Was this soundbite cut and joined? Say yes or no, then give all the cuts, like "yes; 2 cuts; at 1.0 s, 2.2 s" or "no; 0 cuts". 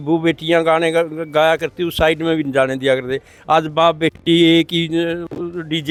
no; 0 cuts